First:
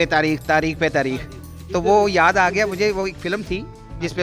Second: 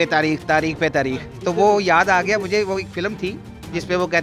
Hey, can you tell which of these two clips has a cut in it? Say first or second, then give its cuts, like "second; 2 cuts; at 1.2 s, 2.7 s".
second; 1 cut; at 1.3 s